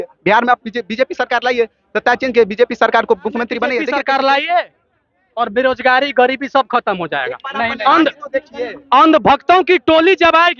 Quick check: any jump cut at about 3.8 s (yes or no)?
yes